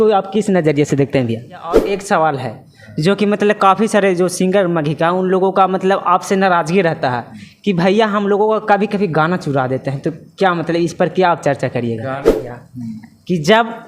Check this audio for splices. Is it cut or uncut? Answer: cut